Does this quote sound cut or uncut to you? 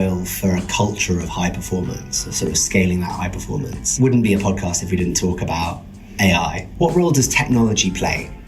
cut